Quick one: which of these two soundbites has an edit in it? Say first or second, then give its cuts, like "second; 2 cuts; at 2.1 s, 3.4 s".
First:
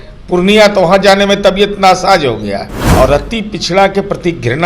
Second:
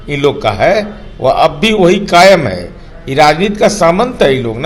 first; 1 cut; at 2.8 s